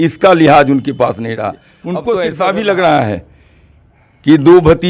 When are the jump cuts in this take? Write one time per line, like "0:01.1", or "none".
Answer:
0:02.2